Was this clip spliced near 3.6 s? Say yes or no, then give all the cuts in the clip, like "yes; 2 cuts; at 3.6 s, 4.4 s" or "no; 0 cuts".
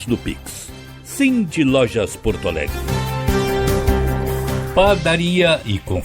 yes; 3 cuts; at 2.7 s, 3.6 s, 4.4 s